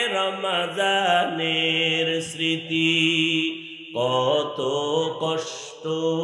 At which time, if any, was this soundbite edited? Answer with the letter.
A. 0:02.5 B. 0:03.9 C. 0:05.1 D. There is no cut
D